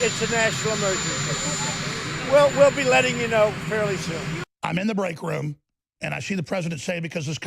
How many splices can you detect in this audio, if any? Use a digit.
1